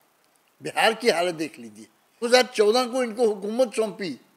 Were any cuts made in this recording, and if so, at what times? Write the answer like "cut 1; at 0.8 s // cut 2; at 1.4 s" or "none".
cut 1; at 2.3 s